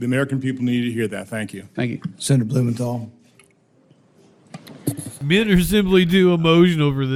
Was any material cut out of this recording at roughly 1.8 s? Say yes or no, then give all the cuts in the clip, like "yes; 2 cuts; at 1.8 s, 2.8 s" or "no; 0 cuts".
no; 0 cuts